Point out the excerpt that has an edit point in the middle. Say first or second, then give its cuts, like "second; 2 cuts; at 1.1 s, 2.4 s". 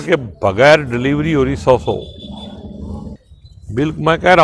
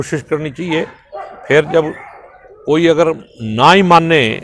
first; 1 cut; at 3.2 s